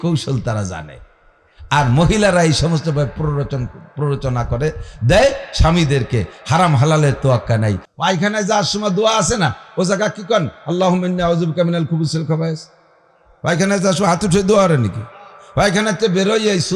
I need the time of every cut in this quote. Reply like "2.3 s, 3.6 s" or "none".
7.8 s